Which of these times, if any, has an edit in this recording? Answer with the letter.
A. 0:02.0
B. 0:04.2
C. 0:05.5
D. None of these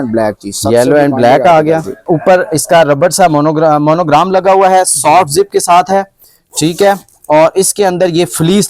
A